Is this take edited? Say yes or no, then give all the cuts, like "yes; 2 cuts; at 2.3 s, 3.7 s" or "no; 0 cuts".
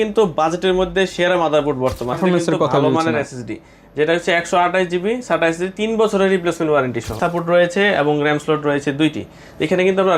yes; 2 cuts; at 2.2 s, 7.1 s